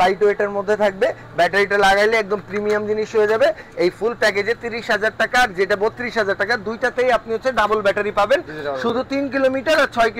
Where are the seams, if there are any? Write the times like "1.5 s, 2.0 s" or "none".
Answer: none

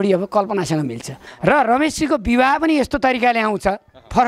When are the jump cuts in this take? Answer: 1.2 s

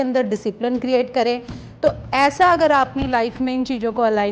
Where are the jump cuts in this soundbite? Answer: none

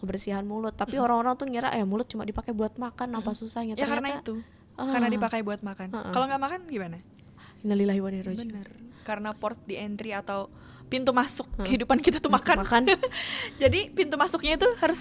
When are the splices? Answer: none

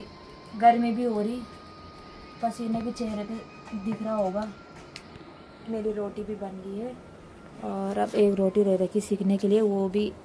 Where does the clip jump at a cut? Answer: none

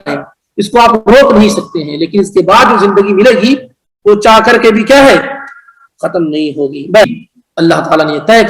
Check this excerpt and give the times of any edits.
7.1 s

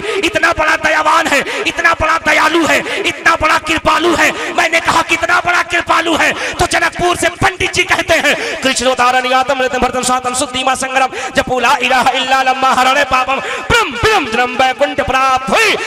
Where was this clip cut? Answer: none

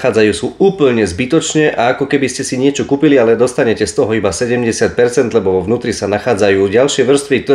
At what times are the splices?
none

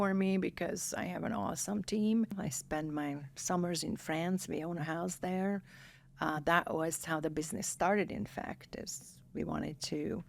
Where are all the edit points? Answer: 2.4 s

